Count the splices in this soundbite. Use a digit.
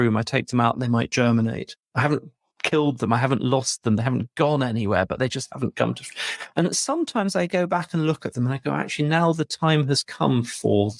0